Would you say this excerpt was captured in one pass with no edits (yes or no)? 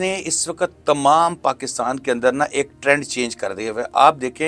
yes